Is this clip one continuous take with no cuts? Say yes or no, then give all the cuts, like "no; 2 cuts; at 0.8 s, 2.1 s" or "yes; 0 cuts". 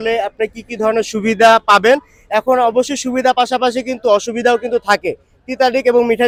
yes; 0 cuts